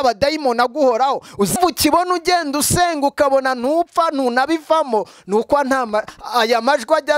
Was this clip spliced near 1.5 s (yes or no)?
yes